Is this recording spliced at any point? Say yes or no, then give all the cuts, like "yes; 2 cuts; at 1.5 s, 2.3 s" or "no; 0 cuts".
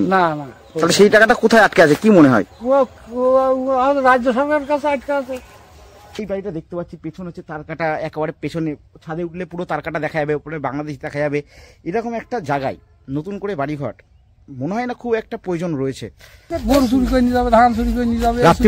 yes; 2 cuts; at 6.2 s, 16.5 s